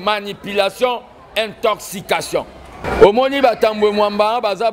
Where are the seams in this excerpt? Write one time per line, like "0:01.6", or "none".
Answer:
0:02.8